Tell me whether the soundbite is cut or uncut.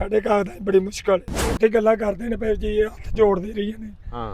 cut